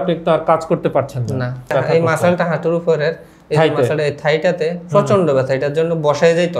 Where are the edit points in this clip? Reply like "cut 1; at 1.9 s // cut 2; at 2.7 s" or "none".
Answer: cut 1; at 1.7 s